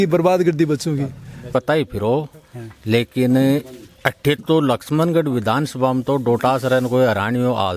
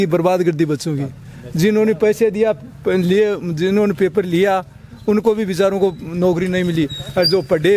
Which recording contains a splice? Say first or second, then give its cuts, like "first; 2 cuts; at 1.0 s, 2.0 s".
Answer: first; 1 cut; at 1.5 s